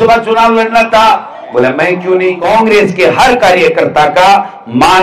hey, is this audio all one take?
no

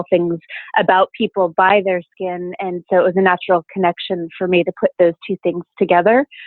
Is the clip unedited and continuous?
yes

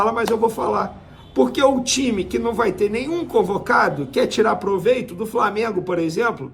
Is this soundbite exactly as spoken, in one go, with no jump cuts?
yes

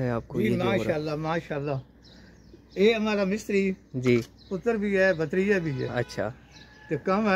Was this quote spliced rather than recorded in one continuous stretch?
no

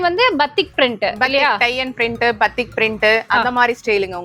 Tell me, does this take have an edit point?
no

